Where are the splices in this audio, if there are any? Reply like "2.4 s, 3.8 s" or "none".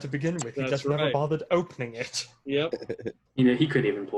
3.2 s